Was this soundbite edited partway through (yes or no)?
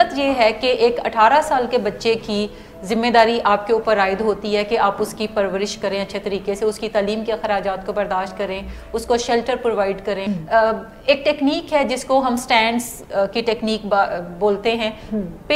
yes